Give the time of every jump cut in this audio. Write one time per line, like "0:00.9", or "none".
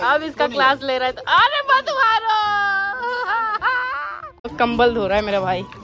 0:04.5